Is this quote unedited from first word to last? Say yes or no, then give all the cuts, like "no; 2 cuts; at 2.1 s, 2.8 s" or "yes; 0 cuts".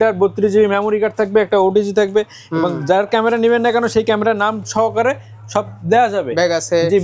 yes; 0 cuts